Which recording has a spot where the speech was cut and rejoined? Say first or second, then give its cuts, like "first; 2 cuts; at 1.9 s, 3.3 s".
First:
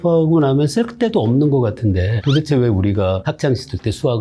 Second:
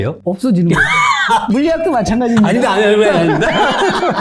first; 2 cuts; at 2.1 s, 3.3 s